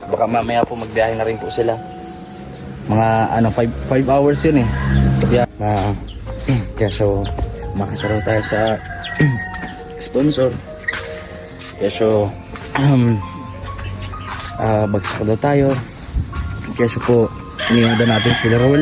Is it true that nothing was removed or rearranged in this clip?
no; 1 cut; at 5.5 s

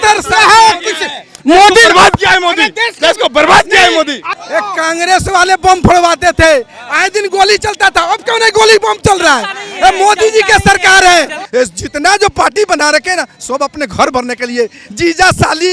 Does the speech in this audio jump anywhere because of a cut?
yes; 2 cuts; at 4.2 s, 11.4 s

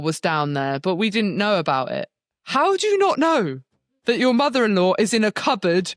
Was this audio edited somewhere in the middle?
no; 0 cuts

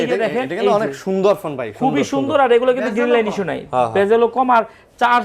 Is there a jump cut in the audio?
no; 0 cuts

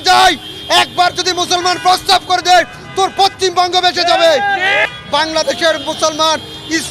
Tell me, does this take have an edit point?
yes; 1 cut; at 4.8 s

